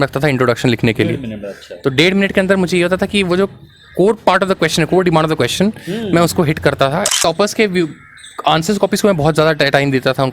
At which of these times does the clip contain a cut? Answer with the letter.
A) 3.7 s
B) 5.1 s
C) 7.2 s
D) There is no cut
C